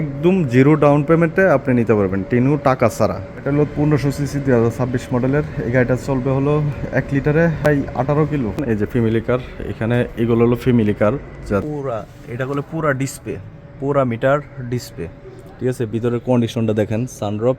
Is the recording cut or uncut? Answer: cut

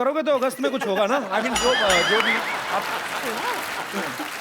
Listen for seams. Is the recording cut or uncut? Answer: uncut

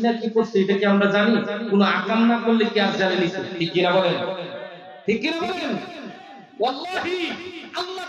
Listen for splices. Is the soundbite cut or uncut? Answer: uncut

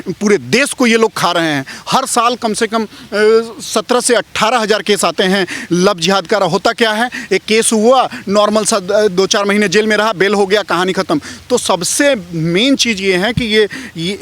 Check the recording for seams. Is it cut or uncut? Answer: uncut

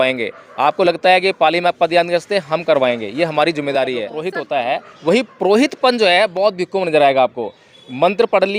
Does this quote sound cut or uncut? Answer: cut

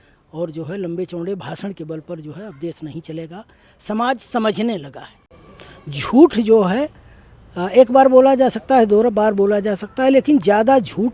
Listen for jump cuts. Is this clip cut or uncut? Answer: uncut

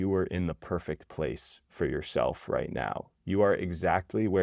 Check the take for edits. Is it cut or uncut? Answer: uncut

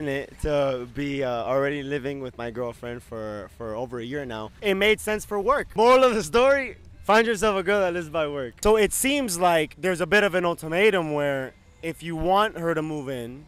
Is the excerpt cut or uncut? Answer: cut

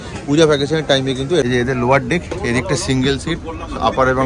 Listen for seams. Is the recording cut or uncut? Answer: cut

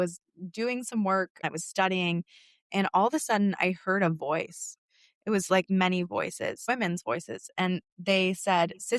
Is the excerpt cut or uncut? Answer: cut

